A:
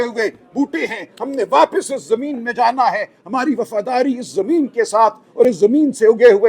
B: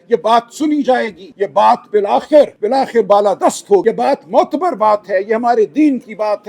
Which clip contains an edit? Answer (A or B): B